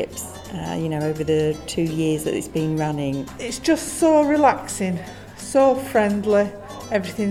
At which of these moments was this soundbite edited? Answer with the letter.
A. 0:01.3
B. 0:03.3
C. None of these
B